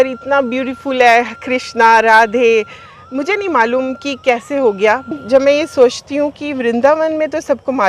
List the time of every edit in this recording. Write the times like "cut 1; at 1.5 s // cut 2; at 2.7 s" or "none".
cut 1; at 5.1 s